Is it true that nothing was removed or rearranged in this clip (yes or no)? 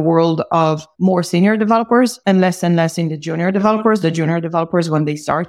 no